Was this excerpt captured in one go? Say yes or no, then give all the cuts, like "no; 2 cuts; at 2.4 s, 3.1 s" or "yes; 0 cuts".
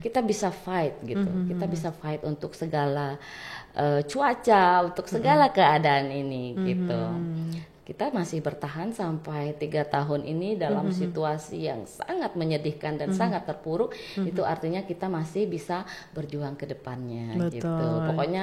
yes; 0 cuts